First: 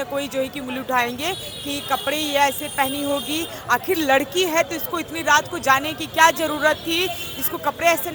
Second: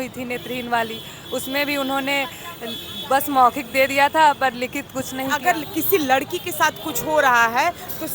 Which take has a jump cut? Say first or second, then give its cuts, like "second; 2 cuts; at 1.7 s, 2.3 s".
second; 1 cut; at 5.4 s